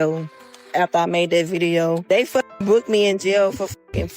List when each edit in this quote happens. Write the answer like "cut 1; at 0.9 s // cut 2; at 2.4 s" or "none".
cut 1; at 2.0 s